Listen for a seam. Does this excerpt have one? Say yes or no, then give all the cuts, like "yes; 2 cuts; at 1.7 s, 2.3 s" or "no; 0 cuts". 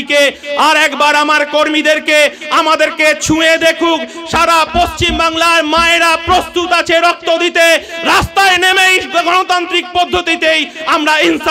no; 0 cuts